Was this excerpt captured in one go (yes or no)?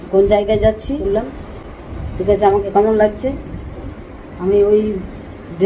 no